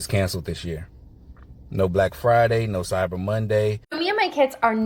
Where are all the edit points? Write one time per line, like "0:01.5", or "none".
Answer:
0:03.8